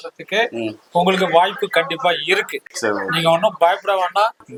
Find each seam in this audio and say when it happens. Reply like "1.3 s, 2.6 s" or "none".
none